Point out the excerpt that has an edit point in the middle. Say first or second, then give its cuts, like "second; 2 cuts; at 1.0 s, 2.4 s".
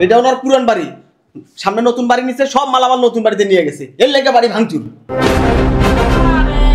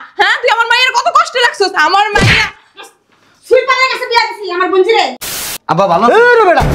second; 1 cut; at 5.3 s